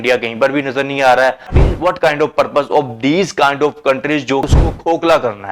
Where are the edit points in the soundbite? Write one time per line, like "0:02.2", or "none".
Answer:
0:01.6
0:04.5